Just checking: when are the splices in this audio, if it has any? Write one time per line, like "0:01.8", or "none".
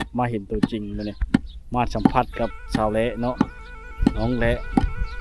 none